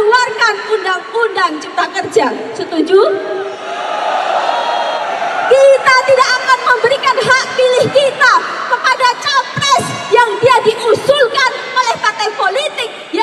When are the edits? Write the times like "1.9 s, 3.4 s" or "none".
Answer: 5.0 s

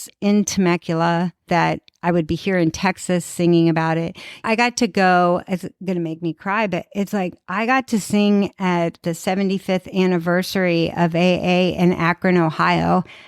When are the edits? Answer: 1.5 s, 4.4 s, 9.0 s

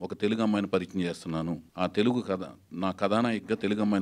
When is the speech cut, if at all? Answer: 1.7 s

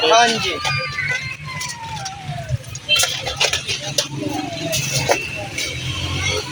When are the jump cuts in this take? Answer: none

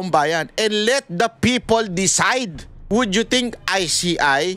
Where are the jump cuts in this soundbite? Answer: 2.7 s

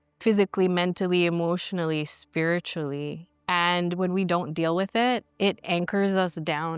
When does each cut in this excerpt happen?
3.3 s

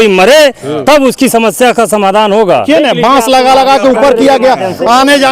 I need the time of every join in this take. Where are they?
2.6 s

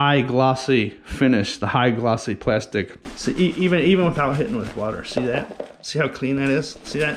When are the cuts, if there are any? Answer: 3.1 s

